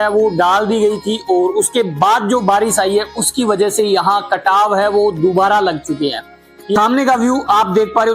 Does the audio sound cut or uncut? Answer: cut